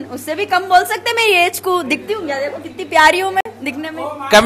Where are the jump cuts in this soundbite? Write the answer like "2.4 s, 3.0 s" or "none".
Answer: none